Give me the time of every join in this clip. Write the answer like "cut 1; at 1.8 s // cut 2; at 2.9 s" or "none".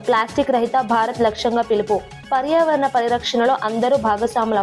none